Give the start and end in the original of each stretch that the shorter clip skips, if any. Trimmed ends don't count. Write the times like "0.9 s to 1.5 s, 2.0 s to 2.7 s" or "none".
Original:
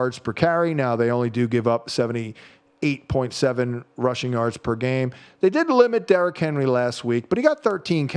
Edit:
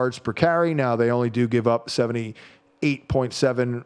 none